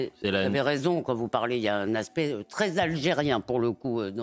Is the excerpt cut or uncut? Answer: uncut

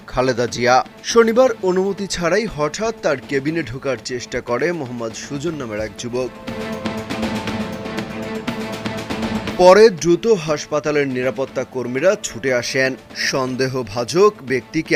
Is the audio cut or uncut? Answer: uncut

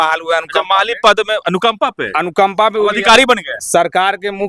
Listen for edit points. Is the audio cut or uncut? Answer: uncut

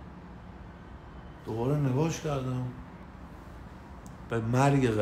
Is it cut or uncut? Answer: cut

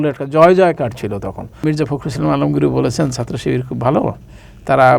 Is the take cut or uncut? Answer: cut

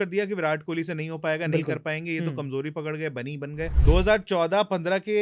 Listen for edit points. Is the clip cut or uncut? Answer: cut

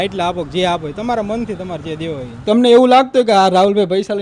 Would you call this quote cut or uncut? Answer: cut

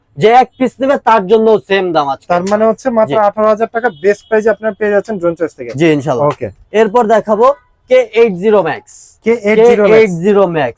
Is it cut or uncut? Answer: uncut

